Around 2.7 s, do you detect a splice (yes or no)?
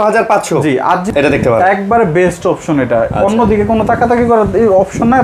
no